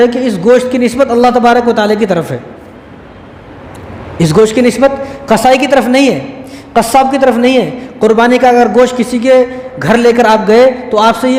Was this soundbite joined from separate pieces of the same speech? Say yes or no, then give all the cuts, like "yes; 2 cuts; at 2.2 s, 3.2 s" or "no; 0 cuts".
no; 0 cuts